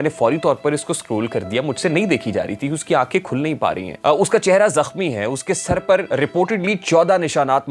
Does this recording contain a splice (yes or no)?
yes